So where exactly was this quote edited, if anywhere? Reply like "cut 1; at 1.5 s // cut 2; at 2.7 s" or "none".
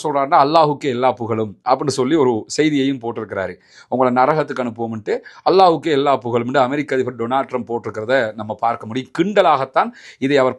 none